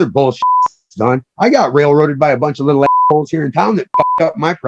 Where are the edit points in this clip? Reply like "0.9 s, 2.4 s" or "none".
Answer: none